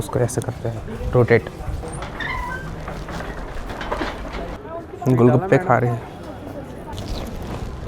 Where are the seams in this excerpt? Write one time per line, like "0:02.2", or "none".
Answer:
0:01.8
0:04.6
0:06.9